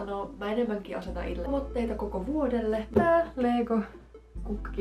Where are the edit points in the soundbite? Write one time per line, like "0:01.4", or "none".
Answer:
0:01.5
0:02.9